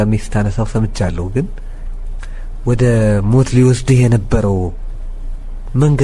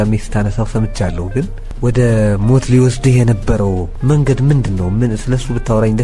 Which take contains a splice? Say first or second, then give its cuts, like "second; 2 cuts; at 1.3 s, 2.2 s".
second; 2 cuts; at 1.6 s, 3.9 s